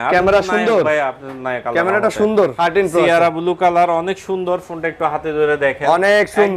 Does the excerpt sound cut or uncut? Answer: cut